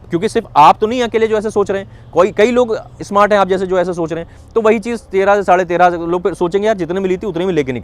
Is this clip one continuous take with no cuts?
yes; 0 cuts

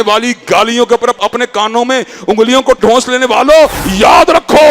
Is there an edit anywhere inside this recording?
yes; 1 cut; at 3.8 s

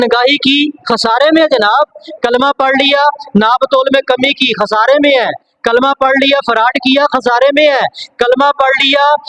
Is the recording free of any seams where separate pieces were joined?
yes; 0 cuts

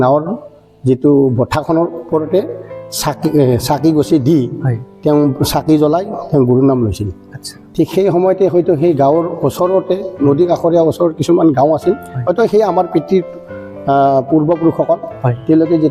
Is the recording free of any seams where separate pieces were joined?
yes; 0 cuts

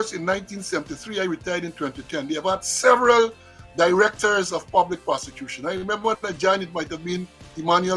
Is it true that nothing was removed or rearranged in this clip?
yes; 0 cuts

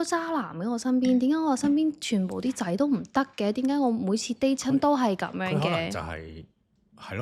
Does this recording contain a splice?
no; 0 cuts

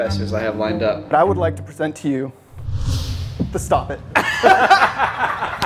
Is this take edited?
yes; 1 cut; at 1.1 s

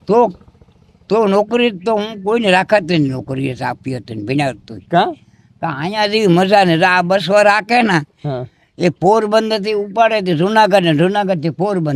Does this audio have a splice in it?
no; 0 cuts

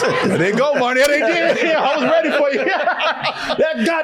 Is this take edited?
no; 0 cuts

